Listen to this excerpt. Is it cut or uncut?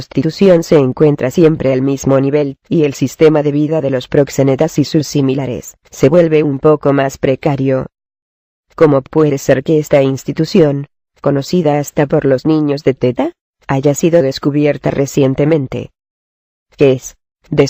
uncut